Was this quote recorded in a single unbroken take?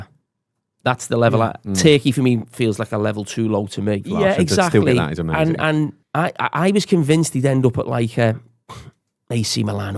yes; 0 cuts

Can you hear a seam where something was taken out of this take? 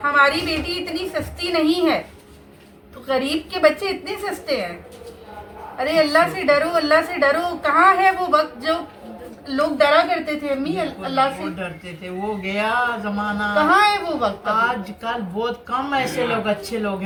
no; 0 cuts

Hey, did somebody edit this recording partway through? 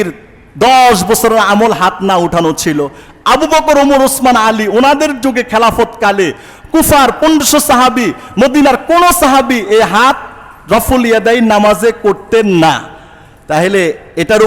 no; 0 cuts

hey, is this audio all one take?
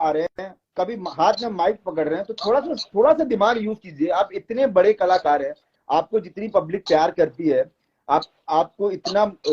yes; 0 cuts

